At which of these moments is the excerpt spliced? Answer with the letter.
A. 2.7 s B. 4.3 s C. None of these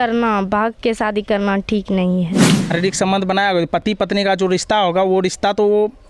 A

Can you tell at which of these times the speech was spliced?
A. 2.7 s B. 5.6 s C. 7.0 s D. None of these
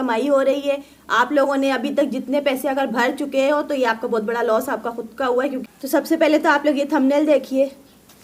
B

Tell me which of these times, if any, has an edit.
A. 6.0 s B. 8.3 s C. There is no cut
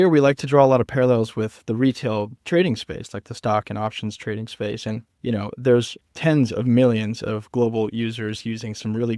A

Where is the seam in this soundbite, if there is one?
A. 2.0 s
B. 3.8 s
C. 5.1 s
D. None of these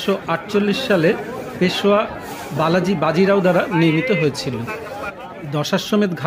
C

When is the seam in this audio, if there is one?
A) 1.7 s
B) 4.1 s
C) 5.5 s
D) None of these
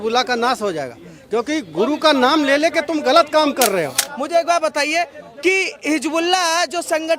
B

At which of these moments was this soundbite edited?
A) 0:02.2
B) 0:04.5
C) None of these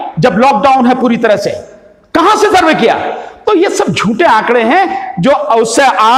C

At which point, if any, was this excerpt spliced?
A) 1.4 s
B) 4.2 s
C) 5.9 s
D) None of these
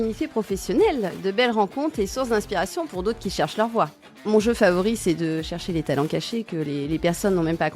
B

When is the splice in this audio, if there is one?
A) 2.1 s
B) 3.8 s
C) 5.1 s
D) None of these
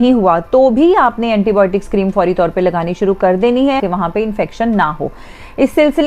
B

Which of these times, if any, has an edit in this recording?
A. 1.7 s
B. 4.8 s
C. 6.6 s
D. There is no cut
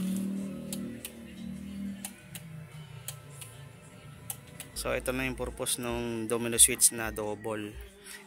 B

